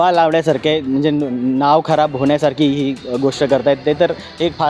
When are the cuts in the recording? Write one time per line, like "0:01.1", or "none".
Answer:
none